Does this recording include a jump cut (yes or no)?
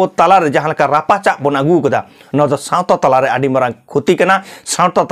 no